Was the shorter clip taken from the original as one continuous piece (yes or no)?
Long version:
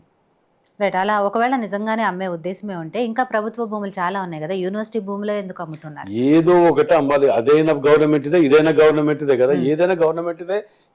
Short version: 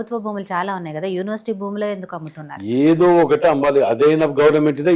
yes